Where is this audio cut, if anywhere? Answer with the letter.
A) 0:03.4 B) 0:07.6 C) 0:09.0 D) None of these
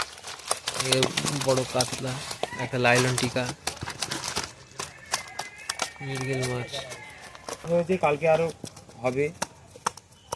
B